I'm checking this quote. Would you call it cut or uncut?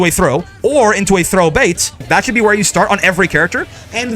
cut